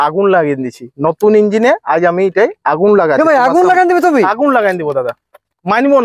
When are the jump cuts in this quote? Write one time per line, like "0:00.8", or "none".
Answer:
none

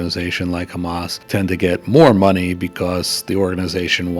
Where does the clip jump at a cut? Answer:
0:01.1

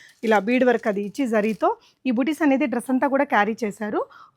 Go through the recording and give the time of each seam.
none

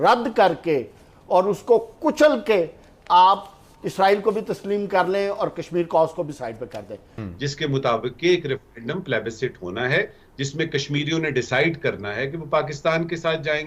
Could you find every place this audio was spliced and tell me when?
0:07.1

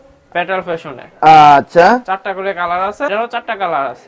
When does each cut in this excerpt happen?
0:03.1

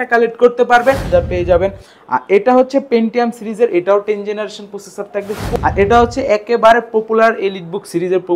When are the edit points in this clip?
0:01.1
0:05.4

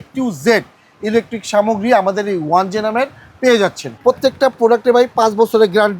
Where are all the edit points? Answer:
0:03.9

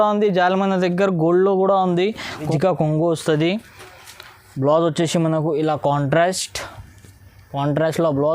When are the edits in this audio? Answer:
0:02.4

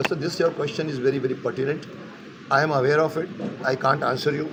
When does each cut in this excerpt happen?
none

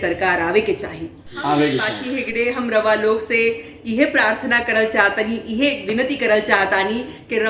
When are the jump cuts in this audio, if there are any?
0:01.9

